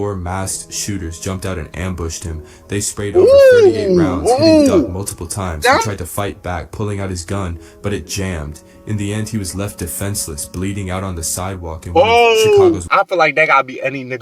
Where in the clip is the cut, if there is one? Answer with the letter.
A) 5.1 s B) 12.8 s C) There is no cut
B